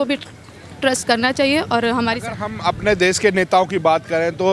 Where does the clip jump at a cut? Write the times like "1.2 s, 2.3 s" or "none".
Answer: none

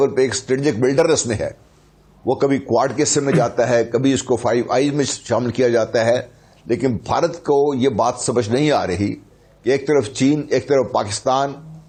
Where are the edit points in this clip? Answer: none

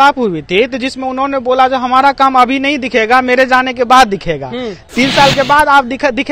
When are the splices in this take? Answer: none

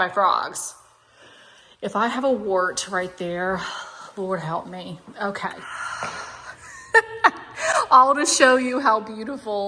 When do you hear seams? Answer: 5.8 s

